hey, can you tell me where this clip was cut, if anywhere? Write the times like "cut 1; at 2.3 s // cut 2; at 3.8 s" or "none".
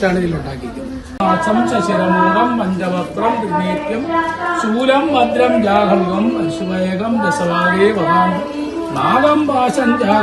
cut 1; at 1.1 s